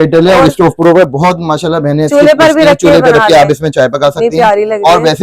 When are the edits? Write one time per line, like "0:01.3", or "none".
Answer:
none